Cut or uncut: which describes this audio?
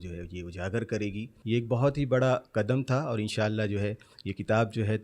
cut